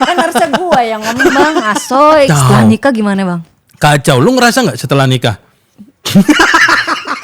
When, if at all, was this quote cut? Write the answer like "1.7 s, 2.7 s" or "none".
2.3 s